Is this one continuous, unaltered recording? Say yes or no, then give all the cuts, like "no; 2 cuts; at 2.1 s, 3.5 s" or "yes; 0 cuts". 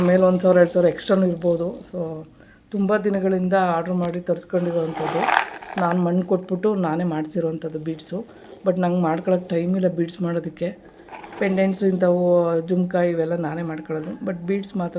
yes; 0 cuts